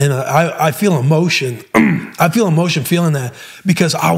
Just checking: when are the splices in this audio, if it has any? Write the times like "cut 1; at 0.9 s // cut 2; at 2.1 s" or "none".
none